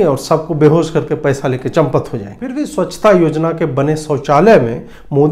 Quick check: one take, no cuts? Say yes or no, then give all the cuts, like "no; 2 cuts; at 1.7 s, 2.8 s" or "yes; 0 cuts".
no; 1 cut; at 2.6 s